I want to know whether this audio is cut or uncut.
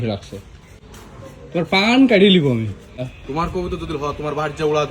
cut